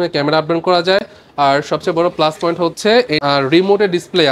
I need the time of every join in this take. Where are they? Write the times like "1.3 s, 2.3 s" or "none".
none